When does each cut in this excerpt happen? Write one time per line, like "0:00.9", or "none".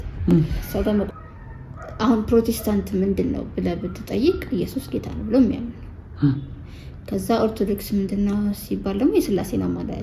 0:01.1